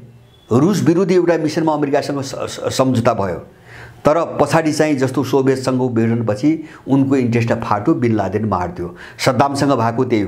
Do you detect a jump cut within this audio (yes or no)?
no